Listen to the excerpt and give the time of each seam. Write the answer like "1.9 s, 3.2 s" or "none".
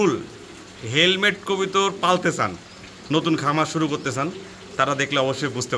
none